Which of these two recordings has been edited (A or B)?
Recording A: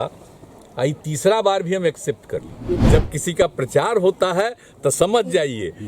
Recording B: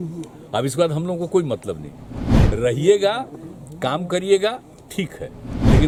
A